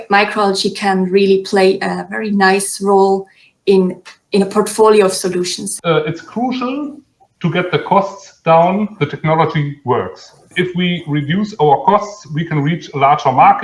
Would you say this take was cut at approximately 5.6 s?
yes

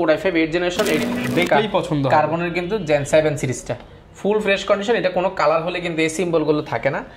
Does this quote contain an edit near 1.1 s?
yes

